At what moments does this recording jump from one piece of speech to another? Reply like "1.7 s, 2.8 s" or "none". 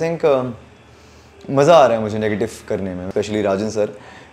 3.0 s